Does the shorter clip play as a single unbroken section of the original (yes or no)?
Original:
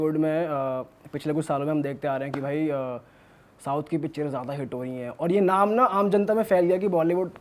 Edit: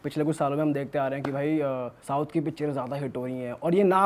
no